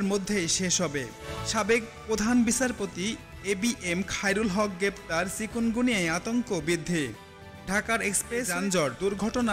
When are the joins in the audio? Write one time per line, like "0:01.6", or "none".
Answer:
0:01.4
0:08.5

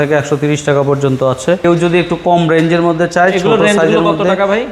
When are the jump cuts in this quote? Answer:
0:01.6

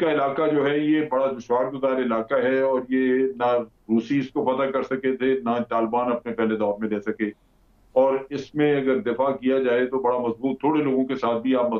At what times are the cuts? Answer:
none

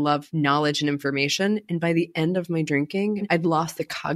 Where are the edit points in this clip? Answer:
0:03.3

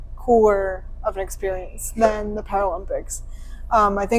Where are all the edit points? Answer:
none

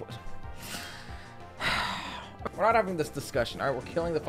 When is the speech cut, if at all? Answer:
0:02.5

